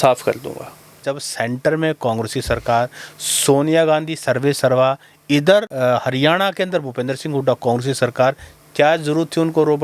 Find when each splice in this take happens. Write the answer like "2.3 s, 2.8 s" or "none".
0.9 s, 5.7 s